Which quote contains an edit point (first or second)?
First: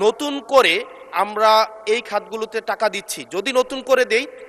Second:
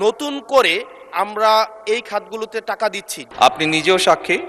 second